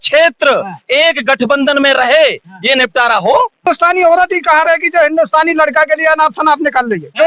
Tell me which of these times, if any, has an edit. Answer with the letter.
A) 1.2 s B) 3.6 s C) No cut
B